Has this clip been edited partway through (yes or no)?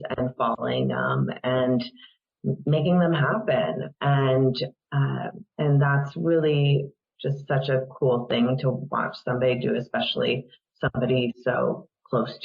yes